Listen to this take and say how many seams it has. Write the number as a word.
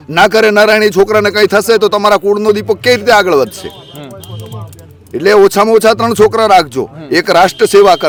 zero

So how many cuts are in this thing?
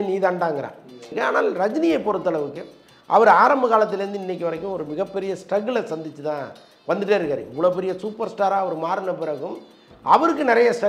one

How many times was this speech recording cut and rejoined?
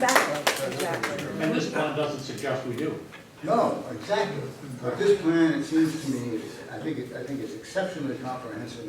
zero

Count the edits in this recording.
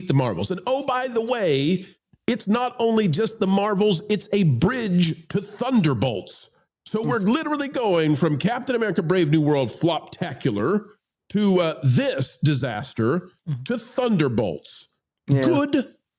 zero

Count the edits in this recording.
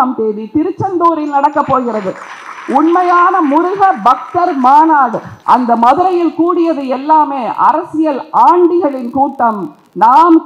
one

